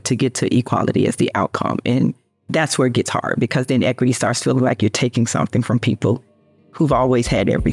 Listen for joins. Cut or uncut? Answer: cut